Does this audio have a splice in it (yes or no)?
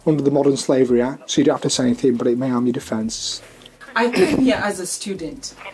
no